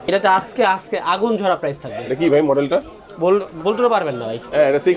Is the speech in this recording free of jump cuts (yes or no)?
yes